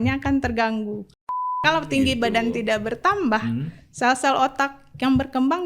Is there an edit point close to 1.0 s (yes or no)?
yes